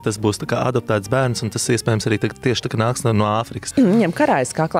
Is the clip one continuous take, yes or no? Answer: no